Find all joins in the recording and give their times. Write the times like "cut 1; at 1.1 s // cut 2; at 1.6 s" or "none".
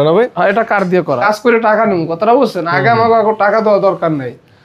cut 1; at 1.2 s